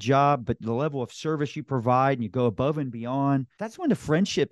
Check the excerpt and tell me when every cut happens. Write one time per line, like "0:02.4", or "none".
0:03.6